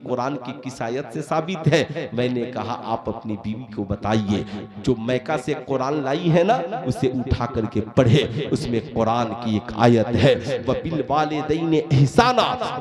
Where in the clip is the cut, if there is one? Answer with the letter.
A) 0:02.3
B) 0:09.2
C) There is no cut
C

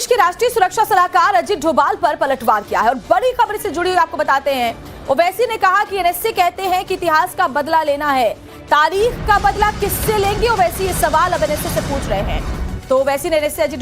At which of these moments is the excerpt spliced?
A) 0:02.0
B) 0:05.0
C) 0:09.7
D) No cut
A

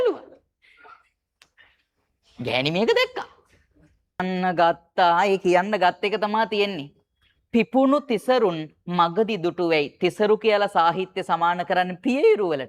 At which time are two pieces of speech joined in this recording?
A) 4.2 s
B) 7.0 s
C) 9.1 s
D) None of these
A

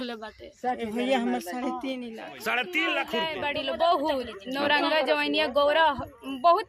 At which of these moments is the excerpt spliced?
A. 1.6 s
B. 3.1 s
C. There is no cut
B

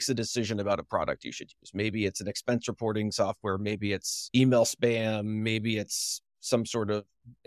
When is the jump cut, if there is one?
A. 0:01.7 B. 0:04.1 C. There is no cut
B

